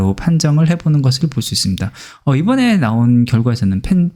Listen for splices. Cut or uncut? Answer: uncut